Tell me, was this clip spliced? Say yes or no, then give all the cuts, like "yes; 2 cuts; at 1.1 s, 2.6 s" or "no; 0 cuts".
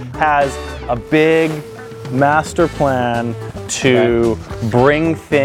no; 0 cuts